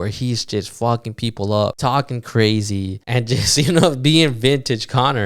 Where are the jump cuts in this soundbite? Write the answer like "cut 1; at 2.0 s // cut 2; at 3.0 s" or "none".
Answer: cut 1; at 1.8 s // cut 2; at 3.0 s